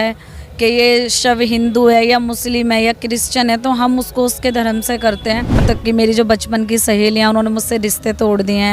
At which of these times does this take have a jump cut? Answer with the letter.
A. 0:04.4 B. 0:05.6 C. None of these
B